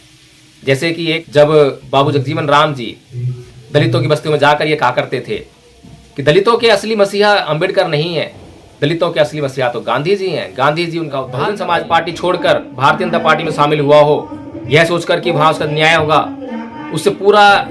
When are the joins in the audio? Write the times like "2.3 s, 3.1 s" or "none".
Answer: 1.2 s, 11.2 s